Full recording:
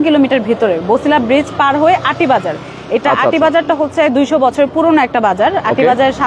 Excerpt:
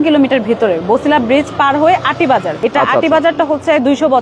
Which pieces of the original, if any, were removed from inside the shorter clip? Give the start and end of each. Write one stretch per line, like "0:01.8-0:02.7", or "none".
0:02.5-0:02.8

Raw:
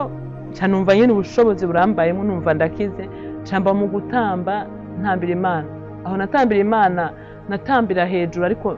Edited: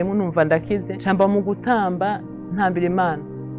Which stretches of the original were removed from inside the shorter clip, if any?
0:03.0-0:03.4

